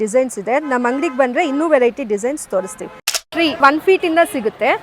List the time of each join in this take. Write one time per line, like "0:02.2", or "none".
0:03.2